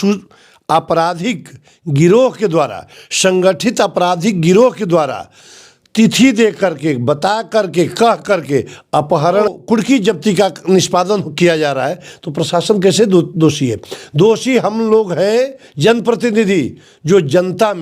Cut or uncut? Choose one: cut